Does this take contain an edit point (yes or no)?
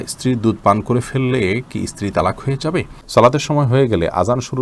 yes